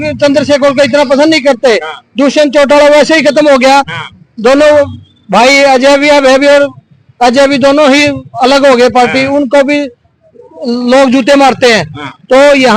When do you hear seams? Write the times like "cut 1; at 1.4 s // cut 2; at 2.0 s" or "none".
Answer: none